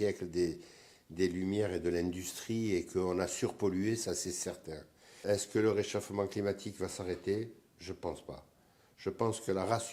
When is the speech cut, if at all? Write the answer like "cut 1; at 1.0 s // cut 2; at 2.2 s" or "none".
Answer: cut 1; at 5.2 s